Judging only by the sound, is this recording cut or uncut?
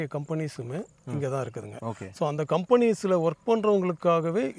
uncut